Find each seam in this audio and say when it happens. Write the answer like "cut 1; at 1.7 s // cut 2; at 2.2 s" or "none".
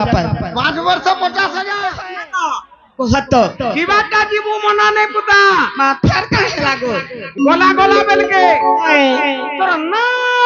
cut 1; at 1.7 s